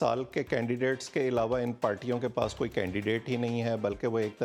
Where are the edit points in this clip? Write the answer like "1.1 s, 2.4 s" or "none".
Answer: none